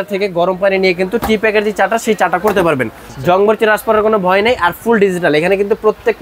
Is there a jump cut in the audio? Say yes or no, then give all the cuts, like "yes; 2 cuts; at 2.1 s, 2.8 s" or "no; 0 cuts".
yes; 1 cut; at 3.0 s